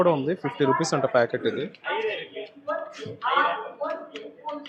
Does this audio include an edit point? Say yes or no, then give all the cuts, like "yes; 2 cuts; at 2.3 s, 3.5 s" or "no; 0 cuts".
no; 0 cuts